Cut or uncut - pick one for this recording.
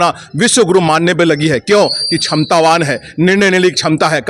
uncut